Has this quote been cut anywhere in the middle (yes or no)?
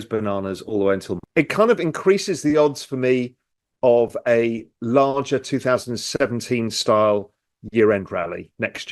yes